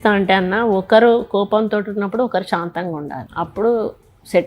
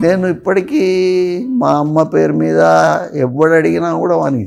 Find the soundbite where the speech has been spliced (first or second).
first